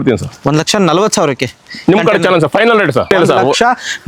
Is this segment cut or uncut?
cut